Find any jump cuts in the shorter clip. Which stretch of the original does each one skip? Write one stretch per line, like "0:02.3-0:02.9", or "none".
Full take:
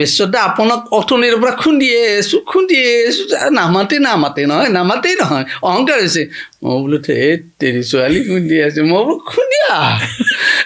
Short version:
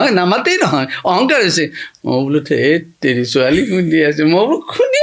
none